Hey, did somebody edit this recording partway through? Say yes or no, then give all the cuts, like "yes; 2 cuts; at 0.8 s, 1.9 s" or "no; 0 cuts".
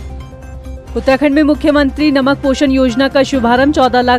no; 0 cuts